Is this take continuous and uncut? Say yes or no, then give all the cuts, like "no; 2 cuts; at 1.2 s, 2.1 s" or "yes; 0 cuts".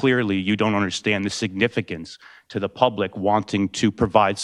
yes; 0 cuts